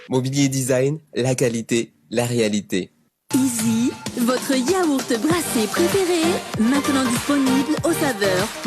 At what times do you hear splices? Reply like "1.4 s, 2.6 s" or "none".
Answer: 3.0 s